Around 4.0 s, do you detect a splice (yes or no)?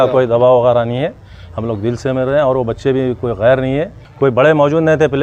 yes